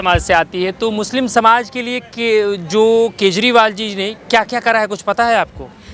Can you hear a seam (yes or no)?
no